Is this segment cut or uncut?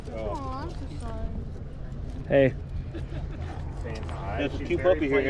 uncut